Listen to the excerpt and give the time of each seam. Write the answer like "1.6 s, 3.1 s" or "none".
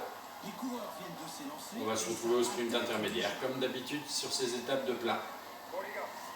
3.3 s